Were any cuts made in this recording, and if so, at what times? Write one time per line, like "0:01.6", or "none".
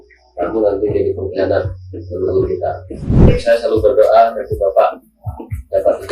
0:03.2